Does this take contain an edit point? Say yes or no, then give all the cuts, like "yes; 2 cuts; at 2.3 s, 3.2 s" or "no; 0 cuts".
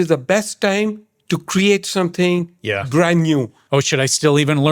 yes; 1 cut; at 3.6 s